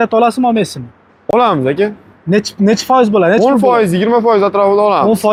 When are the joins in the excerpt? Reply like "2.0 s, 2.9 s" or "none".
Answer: none